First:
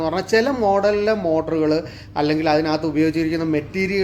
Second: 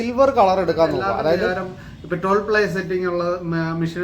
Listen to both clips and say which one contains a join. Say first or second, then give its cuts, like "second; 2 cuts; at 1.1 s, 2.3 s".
second; 1 cut; at 1.5 s